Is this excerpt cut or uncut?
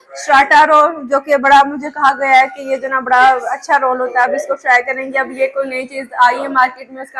uncut